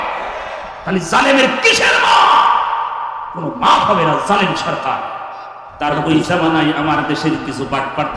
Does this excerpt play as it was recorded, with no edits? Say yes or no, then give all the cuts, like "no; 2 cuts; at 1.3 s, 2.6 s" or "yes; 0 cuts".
no; 1 cut; at 5.6 s